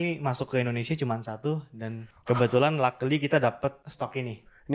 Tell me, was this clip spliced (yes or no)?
yes